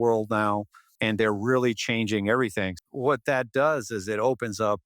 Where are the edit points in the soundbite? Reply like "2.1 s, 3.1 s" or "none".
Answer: 0.9 s, 2.8 s